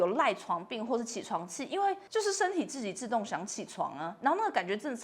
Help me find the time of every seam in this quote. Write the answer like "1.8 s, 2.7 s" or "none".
2.0 s